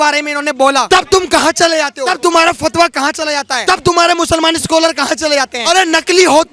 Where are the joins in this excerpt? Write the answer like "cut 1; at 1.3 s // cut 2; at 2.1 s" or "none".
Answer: cut 1; at 0.9 s // cut 2; at 2.1 s // cut 3; at 3.5 s // cut 4; at 5.6 s